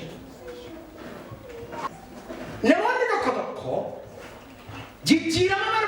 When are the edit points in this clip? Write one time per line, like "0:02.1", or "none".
0:01.9